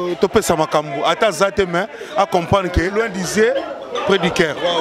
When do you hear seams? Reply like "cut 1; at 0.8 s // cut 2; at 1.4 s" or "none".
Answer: cut 1; at 2.9 s